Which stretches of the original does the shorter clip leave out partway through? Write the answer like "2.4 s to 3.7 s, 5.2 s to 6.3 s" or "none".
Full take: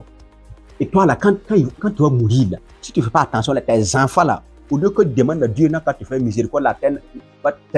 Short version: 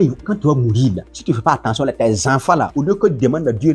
2.6 s to 2.8 s, 4.4 s to 4.7 s

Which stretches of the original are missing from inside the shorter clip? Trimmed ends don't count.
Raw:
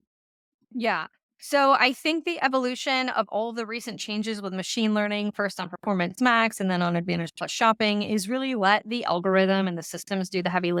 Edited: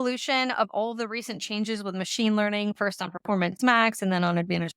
none

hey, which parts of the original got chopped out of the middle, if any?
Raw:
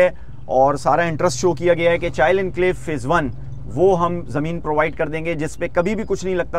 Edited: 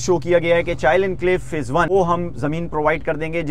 3.2 s to 3.8 s

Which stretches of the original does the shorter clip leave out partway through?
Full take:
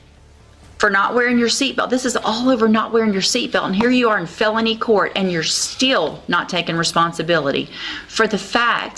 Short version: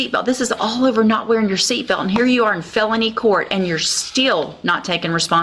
none

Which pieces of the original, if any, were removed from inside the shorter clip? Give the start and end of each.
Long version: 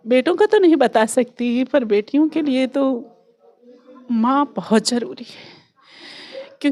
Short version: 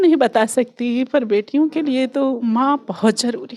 3.0 s to 4.1 s

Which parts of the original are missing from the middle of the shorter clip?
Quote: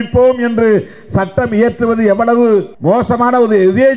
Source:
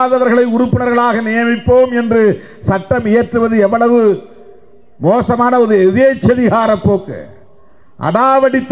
4.3 s to 4.9 s

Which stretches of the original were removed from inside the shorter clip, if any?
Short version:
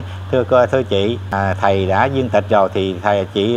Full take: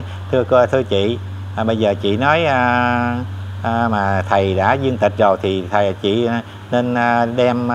1.3 s to 4.0 s

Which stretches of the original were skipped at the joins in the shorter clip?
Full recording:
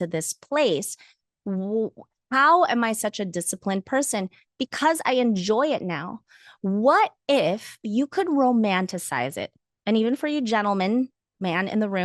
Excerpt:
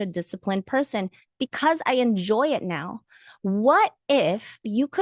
none

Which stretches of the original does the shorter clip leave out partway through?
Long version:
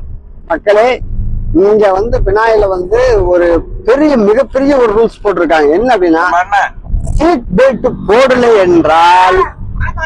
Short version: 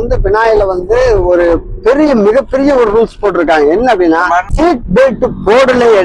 6.5 s to 7.1 s

